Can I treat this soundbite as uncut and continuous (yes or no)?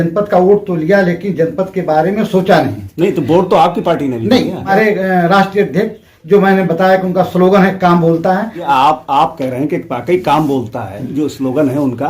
no